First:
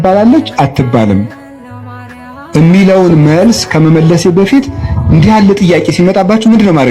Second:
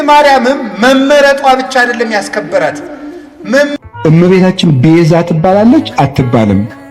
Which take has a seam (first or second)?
second